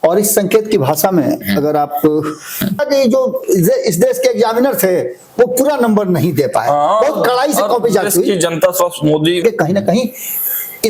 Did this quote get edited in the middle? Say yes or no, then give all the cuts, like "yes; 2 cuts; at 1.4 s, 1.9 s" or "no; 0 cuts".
yes; 2 cuts; at 2.8 s, 9.4 s